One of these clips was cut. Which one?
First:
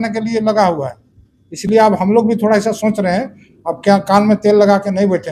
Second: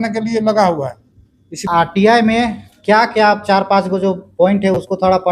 second; 1 cut; at 1.6 s

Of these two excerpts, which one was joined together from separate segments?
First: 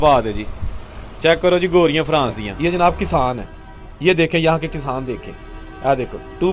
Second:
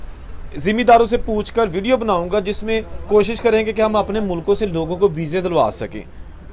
first; 1 cut; at 2.5 s

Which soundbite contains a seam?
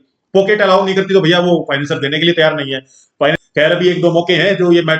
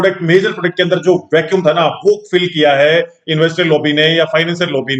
first; 1 cut; at 3.4 s

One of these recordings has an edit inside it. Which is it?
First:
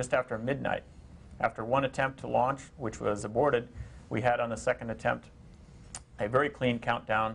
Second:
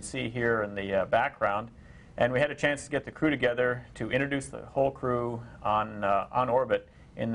second; 1 cut; at 3.9 s

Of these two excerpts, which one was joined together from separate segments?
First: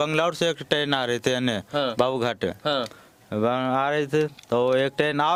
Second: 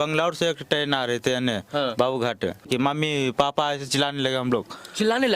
second; 1 cut; at 2.6 s

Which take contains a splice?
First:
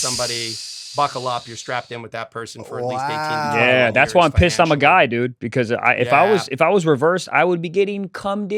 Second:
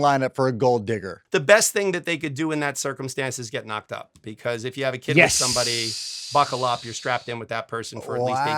second; 1 cut; at 1.2 s

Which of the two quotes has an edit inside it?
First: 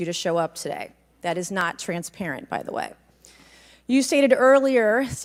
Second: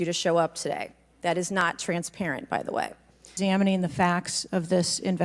second; 1 cut; at 3.3 s

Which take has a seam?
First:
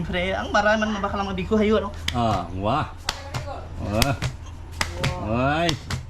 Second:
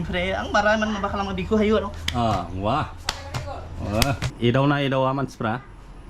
second; 1 cut; at 4.3 s

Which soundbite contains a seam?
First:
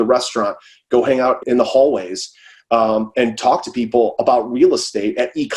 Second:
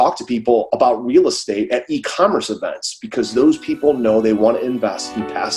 first; 1 cut; at 1.4 s

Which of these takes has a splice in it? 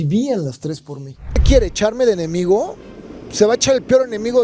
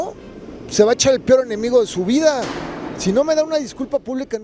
first; 1 cut; at 1.3 s

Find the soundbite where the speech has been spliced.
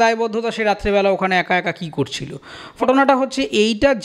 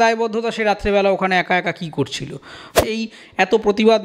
second; 1 cut; at 2.8 s

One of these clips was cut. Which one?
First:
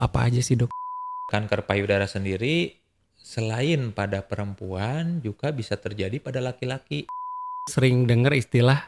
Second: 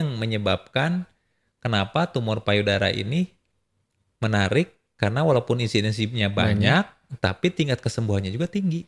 first; 2 cuts; at 1.3 s, 7.7 s

